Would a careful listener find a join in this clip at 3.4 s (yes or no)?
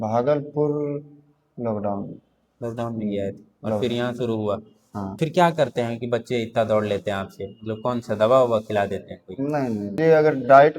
no